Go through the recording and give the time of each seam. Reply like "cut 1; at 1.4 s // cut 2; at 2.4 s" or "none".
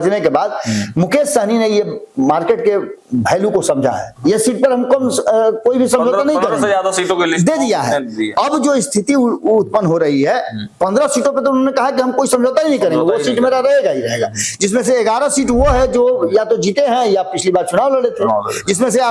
cut 1; at 4.1 s

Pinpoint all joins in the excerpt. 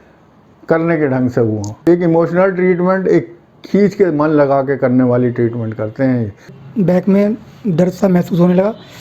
cut 1; at 1.7 s // cut 2; at 6.6 s

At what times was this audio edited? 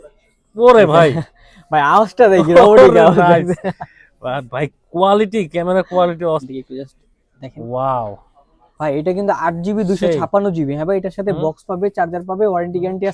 cut 1; at 6.5 s

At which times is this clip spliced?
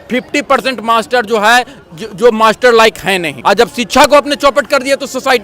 cut 1; at 3.3 s

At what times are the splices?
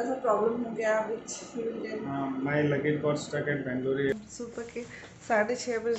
cut 1; at 4.1 s

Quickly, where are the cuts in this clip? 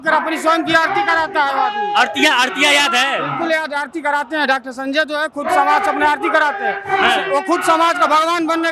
none

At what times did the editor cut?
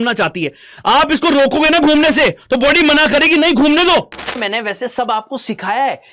cut 1; at 4.4 s

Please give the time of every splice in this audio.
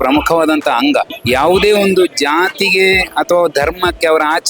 cut 1; at 1.2 s

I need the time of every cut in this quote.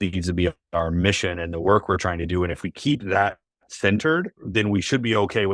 cut 1; at 4.4 s

